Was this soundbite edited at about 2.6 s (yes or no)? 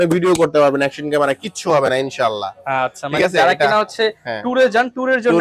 no